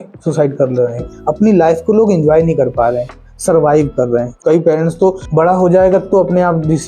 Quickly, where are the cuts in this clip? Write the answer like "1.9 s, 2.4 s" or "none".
1.1 s, 4.4 s, 5.2 s